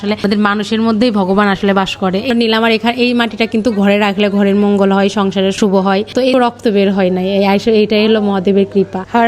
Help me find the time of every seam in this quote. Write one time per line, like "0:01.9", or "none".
0:02.3
0:06.3